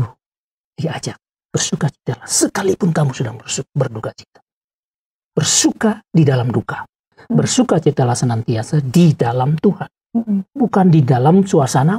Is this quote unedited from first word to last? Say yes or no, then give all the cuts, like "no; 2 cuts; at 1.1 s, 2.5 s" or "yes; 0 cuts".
no; 1 cut; at 7.1 s